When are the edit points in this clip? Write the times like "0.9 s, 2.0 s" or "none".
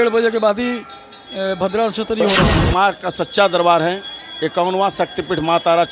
2.5 s